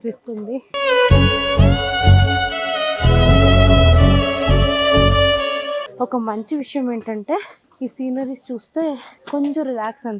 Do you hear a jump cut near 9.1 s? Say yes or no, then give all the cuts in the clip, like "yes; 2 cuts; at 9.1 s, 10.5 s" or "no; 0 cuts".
yes; 2 cuts; at 7.6 s, 9.1 s